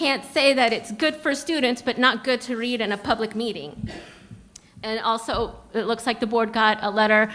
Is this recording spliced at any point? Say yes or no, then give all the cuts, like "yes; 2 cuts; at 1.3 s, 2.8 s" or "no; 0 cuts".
no; 0 cuts